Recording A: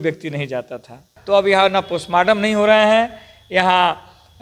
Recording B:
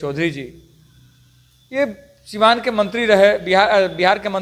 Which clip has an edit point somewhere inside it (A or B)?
A